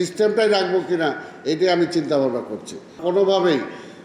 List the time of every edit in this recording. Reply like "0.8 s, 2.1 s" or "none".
2.9 s